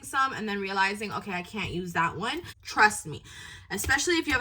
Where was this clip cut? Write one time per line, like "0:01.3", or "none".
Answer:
0:02.5